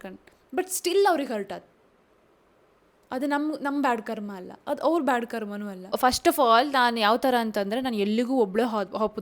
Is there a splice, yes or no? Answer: yes